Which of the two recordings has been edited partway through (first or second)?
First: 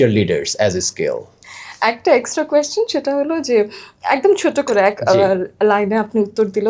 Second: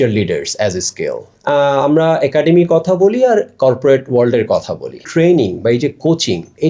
second